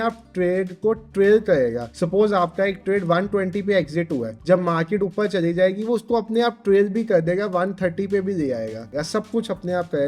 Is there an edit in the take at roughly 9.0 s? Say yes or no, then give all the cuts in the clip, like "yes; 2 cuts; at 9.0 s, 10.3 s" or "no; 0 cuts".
yes; 3 cuts; at 1.9 s, 4.3 s, 9.0 s